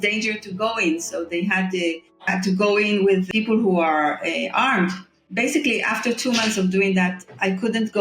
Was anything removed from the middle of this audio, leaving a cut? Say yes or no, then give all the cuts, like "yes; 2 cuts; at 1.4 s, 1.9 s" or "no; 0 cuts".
yes; 3 cuts; at 2.2 s, 3.3 s, 5.3 s